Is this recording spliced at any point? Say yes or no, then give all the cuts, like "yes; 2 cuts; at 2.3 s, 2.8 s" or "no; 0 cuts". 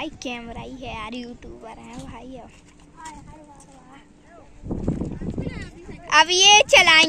no; 0 cuts